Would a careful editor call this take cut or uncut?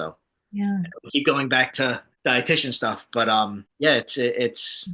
cut